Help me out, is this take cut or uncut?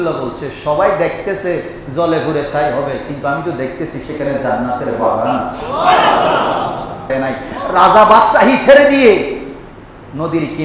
cut